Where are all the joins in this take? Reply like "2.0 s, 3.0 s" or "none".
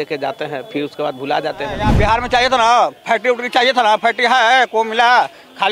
1.9 s